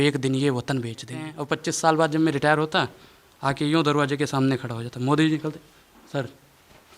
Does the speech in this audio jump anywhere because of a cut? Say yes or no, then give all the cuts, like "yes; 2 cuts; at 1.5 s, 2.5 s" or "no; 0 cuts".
yes; 1 cut; at 1.4 s